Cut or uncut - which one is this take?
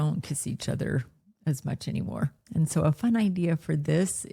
uncut